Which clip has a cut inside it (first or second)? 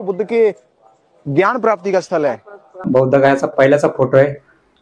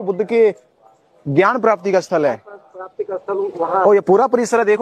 first